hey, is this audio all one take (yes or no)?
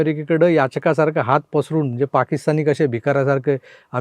yes